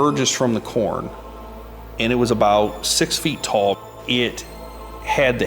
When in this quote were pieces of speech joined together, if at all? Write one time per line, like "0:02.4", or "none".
0:03.8